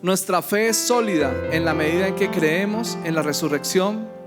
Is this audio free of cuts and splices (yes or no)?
yes